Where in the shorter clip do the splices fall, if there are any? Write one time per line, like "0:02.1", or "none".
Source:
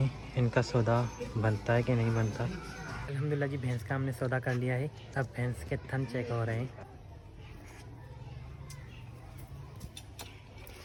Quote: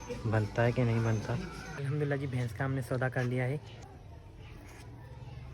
0:01.7
0:03.8